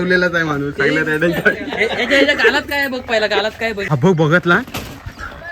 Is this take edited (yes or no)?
yes